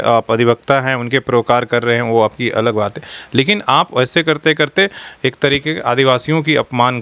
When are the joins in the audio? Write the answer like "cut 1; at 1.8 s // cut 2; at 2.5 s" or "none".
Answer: none